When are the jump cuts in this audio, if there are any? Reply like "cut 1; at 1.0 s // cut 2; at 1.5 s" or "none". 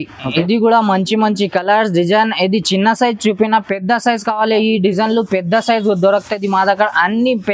none